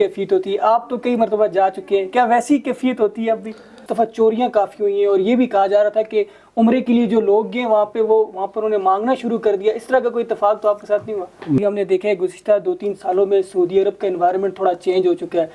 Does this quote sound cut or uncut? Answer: cut